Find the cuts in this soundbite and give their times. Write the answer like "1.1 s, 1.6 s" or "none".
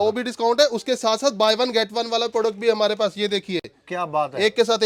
none